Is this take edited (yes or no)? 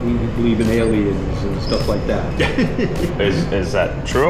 no